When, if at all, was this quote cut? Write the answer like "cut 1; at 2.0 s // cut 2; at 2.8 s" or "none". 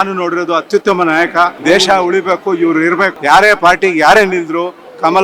cut 1; at 1.6 s // cut 2; at 3.2 s